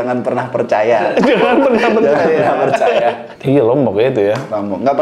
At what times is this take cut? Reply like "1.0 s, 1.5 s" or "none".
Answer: 3.3 s